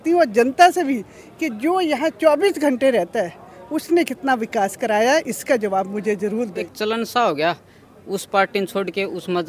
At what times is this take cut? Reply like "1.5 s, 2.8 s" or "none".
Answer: 6.7 s